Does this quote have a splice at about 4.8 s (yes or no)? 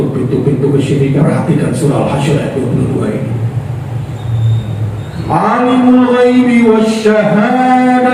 no